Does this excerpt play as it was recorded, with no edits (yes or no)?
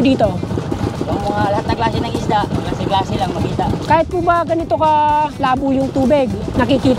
yes